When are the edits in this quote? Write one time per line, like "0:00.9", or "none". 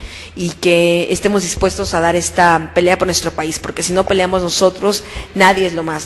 0:04.1